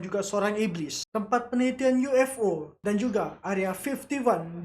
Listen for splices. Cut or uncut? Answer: cut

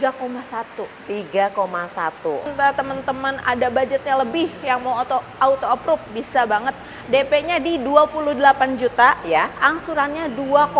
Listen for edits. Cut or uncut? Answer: cut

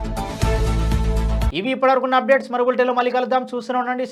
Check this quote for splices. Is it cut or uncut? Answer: uncut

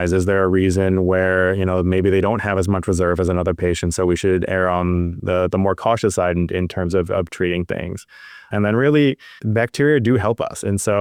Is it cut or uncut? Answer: uncut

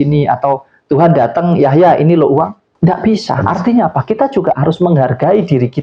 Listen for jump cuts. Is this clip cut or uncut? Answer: cut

